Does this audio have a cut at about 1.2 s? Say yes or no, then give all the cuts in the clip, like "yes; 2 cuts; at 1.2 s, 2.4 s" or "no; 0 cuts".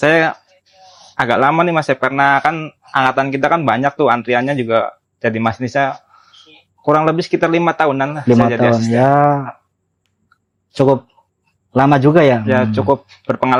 no; 0 cuts